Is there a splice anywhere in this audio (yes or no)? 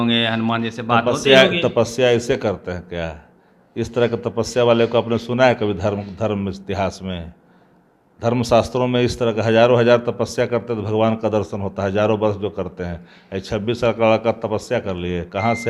no